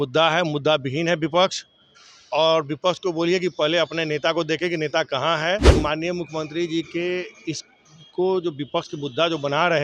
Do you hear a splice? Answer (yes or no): yes